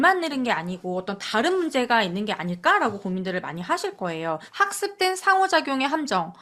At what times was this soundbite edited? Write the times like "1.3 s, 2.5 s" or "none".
4.5 s